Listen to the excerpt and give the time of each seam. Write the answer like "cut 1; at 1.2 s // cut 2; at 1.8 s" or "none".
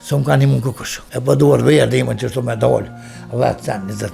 cut 1; at 0.9 s